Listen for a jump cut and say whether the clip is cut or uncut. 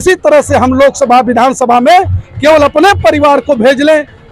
uncut